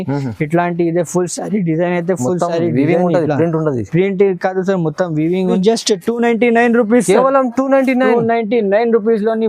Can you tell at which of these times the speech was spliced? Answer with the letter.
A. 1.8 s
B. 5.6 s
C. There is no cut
B